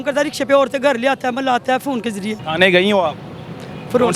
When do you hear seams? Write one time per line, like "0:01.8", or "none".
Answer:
0:02.4